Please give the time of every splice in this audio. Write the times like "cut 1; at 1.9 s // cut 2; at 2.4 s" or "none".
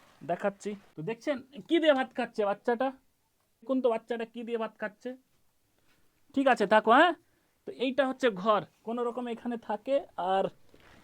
cut 1; at 0.9 s // cut 2; at 3.7 s